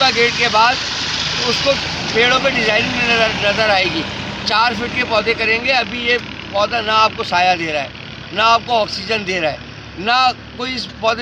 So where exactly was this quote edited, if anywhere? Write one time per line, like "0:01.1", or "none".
none